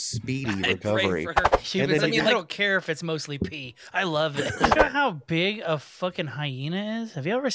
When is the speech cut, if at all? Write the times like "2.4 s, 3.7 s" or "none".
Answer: 1.4 s, 4.8 s